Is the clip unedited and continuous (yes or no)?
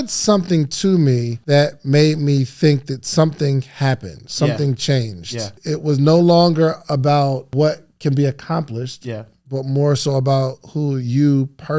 no